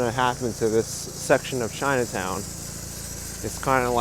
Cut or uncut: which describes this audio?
uncut